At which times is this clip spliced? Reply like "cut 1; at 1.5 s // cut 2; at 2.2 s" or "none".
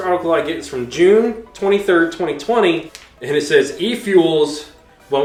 none